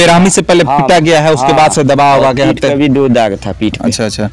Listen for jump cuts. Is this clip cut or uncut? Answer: uncut